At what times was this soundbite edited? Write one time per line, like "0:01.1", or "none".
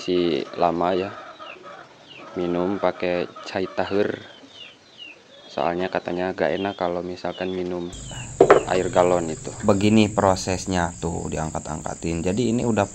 0:09.6

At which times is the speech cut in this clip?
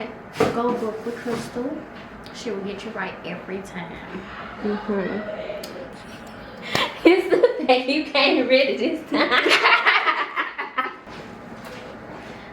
0:06.0
0:11.0

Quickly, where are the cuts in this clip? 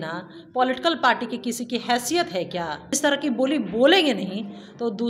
0:02.9

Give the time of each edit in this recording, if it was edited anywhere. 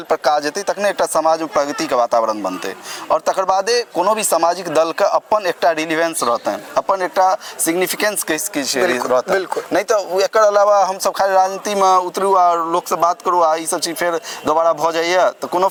none

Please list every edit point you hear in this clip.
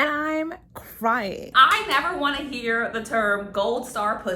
0:01.5

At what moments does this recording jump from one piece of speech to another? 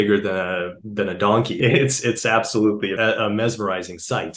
0:01.5
0:02.9

